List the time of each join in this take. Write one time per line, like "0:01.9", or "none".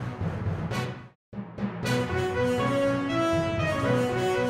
0:01.1